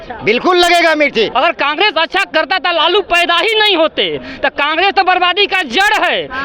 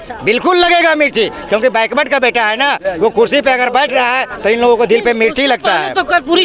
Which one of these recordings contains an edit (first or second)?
first